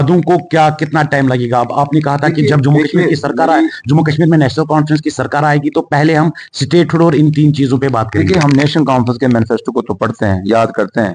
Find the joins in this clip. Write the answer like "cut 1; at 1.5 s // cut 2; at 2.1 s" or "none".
none